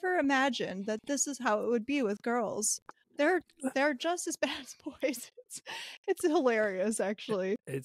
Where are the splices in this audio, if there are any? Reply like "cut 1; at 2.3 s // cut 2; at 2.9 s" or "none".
none